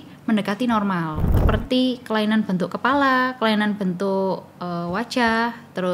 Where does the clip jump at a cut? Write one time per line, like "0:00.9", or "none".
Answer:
0:01.3